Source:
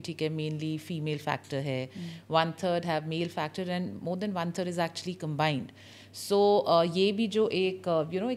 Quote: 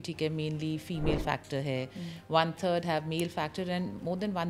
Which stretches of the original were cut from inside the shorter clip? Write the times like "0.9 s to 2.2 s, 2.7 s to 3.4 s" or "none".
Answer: none